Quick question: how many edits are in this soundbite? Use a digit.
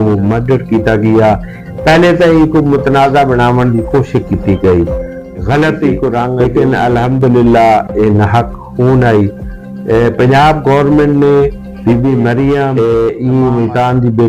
2